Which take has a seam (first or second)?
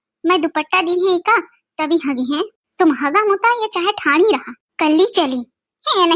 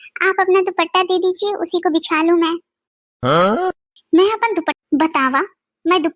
second